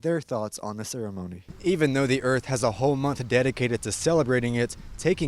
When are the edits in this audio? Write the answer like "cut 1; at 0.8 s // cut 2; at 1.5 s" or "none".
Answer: cut 1; at 1.4 s